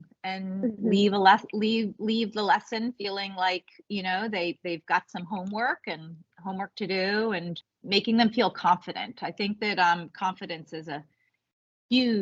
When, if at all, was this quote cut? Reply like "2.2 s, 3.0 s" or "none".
7.6 s

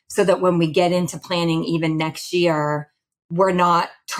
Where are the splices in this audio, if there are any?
none

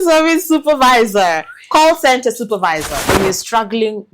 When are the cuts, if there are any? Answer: 3.0 s

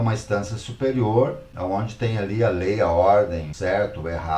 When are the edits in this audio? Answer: 1.5 s, 3.5 s

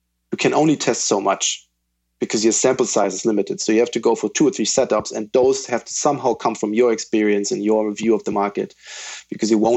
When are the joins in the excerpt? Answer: 3.6 s

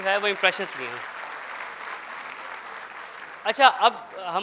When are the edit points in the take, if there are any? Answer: none

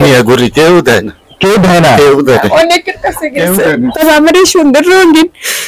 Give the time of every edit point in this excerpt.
3.9 s

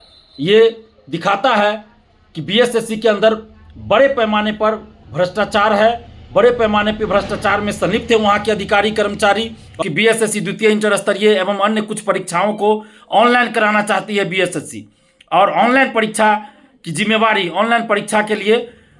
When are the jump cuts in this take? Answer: 9.8 s

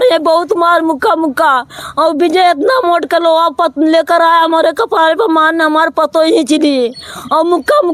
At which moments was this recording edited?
none

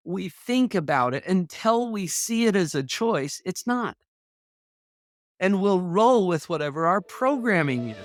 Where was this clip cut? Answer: none

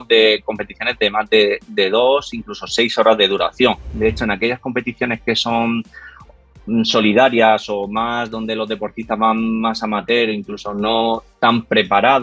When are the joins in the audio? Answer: 3.9 s

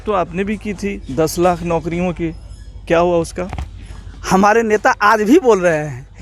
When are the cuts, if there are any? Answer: none

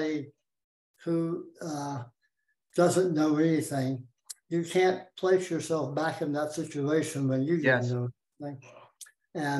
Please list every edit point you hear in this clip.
none

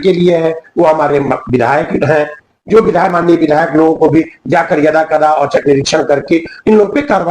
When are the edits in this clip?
none

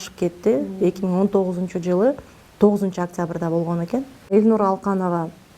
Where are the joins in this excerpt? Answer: 4.3 s

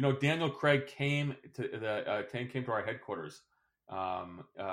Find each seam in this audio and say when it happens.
none

